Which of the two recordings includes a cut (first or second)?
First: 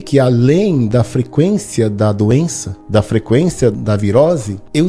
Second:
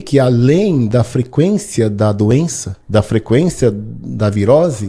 first